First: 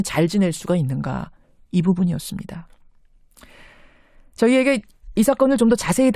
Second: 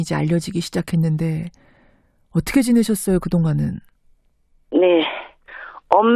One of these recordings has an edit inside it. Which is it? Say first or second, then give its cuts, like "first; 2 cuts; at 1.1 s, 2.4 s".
second; 1 cut; at 5.2 s